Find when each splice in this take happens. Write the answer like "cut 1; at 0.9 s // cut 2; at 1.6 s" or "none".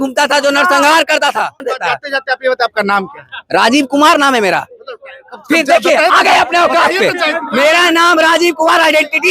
cut 1; at 1.7 s